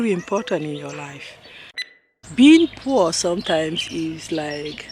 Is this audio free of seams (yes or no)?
no